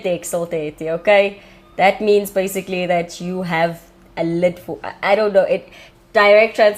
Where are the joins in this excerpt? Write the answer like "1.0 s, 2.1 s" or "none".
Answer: none